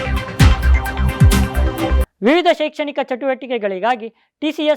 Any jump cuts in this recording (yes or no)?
yes